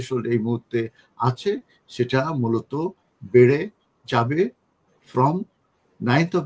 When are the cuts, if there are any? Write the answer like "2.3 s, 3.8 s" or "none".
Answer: none